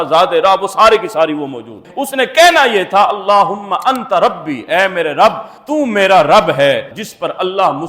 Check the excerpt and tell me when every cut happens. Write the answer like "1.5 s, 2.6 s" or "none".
1.8 s, 6.9 s